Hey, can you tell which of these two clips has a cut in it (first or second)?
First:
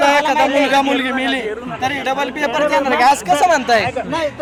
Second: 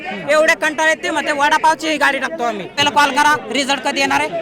second